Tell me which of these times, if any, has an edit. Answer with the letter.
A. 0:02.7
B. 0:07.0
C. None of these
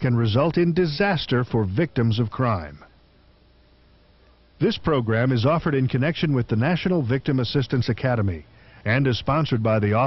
C